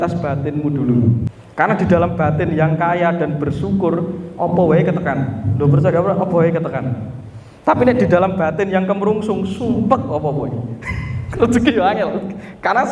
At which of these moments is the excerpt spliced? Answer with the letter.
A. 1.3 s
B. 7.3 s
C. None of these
A